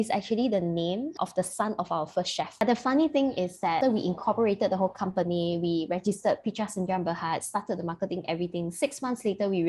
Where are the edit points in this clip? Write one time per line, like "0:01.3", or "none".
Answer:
0:01.1
0:02.6
0:03.8